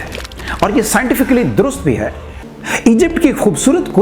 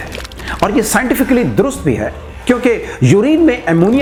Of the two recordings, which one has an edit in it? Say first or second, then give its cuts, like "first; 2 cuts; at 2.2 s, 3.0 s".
first; 1 cut; at 2.3 s